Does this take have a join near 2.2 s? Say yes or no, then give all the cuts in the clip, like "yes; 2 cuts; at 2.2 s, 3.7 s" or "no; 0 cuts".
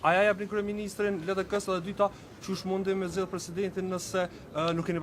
no; 0 cuts